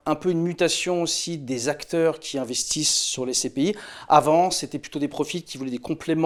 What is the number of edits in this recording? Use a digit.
0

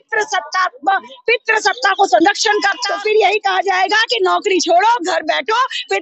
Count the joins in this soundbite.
1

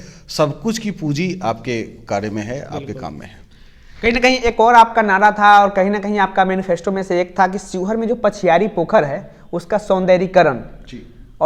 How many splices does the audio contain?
0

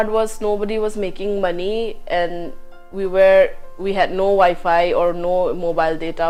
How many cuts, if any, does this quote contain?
0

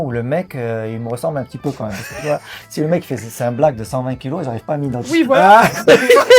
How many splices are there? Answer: 0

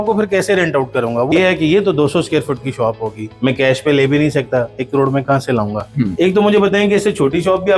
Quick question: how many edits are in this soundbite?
3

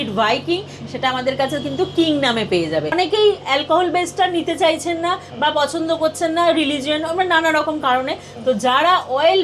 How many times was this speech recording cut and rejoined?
1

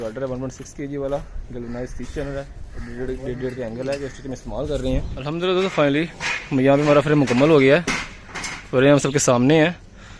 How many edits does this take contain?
1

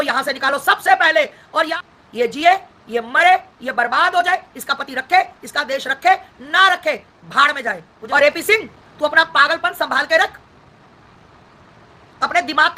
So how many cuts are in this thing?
2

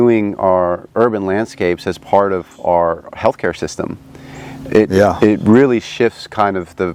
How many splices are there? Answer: 0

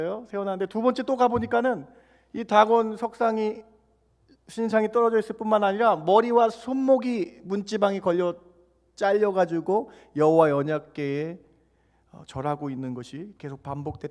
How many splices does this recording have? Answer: 0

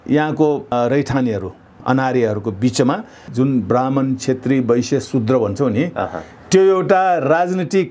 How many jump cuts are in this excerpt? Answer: 3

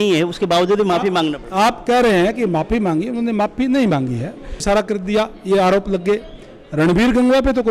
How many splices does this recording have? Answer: 1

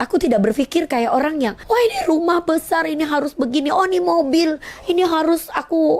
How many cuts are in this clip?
1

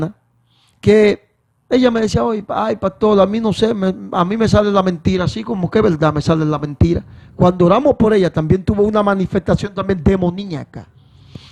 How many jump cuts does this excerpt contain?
0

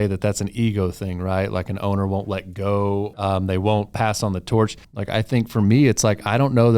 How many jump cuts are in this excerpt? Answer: 2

